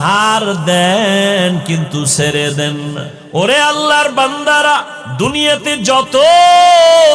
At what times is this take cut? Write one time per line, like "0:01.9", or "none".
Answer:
0:03.1
0:05.0